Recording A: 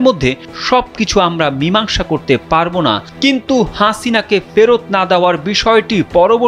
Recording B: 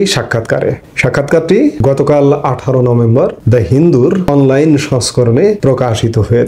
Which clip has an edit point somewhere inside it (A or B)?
B